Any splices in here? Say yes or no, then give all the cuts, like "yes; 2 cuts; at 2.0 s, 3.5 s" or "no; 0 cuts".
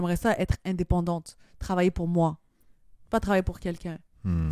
no; 0 cuts